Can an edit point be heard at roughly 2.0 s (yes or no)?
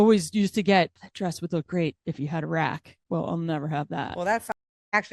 yes